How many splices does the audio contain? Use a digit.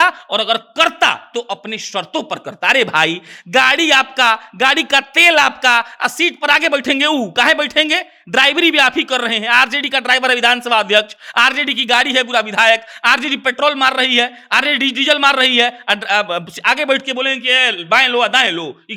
0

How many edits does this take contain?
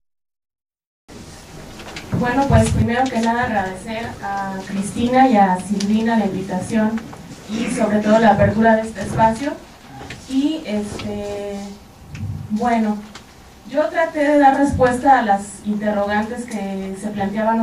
1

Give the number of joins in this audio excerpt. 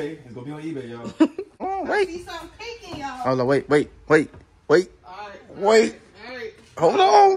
1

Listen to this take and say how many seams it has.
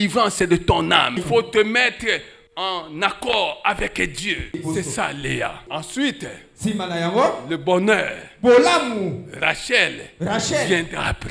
3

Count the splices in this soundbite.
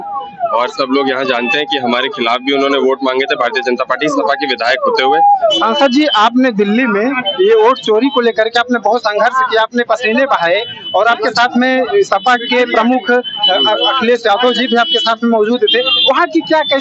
1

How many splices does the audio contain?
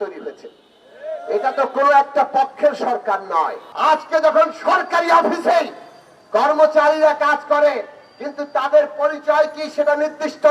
1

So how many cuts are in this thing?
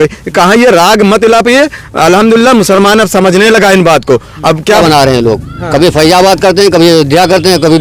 1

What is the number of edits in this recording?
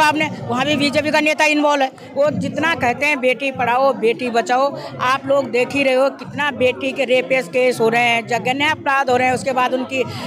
1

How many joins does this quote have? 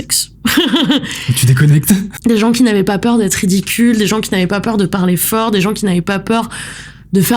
1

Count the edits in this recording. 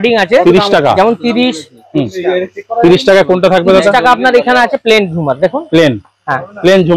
0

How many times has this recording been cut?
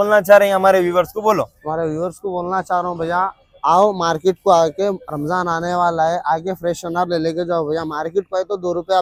0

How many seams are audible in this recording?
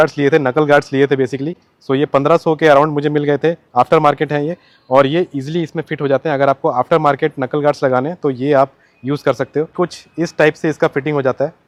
0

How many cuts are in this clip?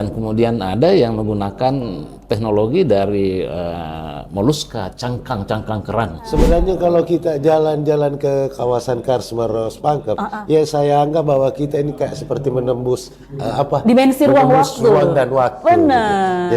1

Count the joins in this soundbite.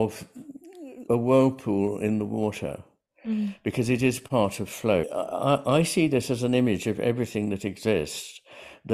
2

